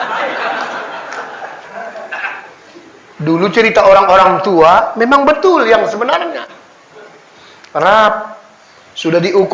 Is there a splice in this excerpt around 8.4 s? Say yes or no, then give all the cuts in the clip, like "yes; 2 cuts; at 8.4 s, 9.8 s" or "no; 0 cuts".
no; 1 cut; at 1.5 s